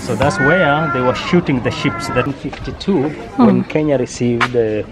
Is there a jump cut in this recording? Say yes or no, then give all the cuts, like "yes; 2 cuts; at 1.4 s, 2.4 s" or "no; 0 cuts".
yes; 1 cut; at 2.3 s